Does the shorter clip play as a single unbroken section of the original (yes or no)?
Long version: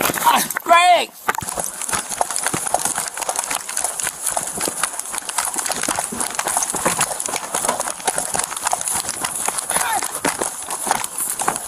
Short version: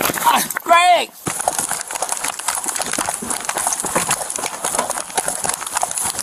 no